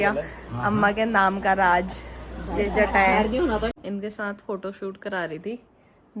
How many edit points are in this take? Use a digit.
1